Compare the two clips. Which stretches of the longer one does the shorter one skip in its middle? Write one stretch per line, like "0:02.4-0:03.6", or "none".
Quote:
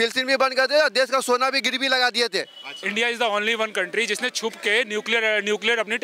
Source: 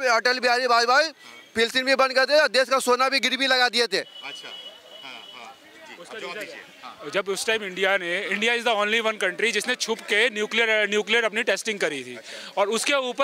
0:04.4-0:08.3